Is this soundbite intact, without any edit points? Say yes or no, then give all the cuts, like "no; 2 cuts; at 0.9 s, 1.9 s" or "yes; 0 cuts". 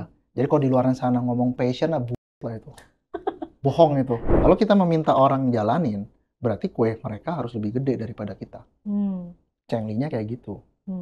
no; 1 cut; at 4.3 s